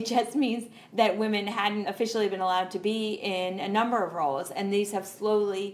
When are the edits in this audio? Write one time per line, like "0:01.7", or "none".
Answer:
0:01.9